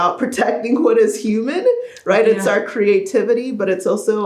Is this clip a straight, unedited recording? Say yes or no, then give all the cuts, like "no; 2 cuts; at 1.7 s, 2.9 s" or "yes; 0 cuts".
yes; 0 cuts